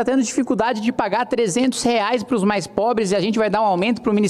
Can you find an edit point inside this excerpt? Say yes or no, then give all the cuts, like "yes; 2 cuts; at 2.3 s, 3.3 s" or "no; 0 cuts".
no; 0 cuts